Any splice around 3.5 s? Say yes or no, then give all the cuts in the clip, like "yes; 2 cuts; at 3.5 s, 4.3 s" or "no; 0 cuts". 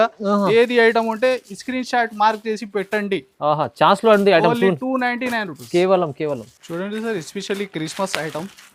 no; 0 cuts